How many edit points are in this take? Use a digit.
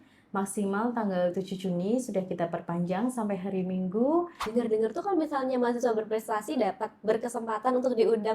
1